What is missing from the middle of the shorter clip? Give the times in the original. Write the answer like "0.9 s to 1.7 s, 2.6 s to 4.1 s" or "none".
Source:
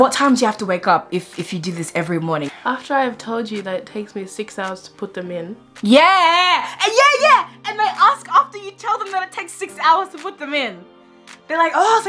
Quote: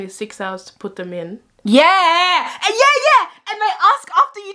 none